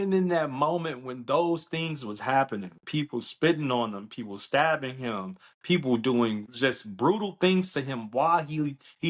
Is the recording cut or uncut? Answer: cut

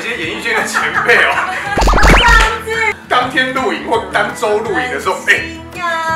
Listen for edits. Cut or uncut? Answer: cut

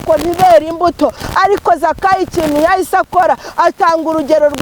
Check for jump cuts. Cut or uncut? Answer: uncut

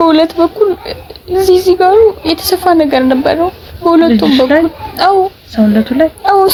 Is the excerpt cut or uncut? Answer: uncut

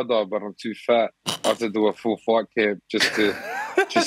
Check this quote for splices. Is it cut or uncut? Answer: uncut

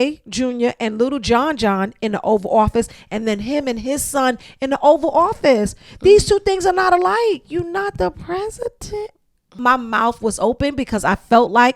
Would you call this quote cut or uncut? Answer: cut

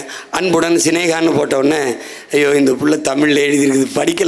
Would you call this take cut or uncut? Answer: uncut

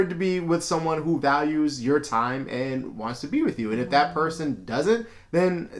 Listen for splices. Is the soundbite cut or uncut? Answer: uncut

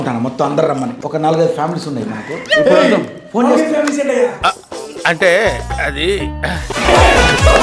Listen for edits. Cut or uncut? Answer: cut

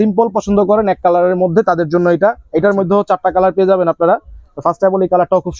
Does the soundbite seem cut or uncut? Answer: uncut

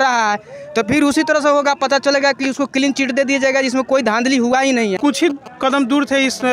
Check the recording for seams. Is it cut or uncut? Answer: cut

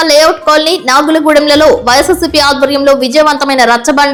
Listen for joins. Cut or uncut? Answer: uncut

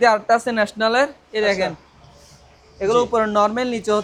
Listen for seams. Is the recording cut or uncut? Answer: uncut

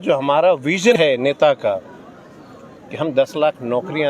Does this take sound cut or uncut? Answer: cut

